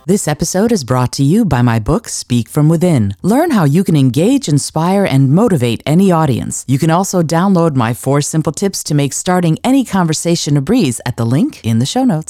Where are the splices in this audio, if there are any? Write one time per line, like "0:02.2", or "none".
none